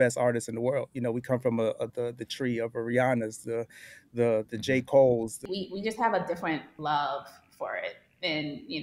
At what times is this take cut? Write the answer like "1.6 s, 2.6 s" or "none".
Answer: 5.4 s, 6.7 s